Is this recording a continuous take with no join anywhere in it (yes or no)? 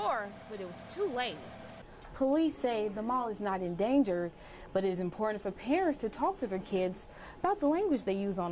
no